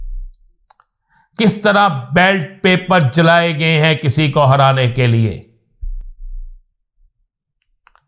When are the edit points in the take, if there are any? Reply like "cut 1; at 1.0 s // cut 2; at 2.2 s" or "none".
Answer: none